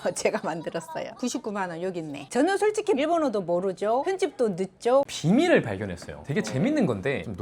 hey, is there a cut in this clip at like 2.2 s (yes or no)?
yes